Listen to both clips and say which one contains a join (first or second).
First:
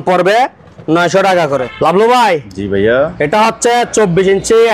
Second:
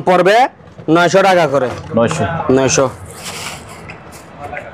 first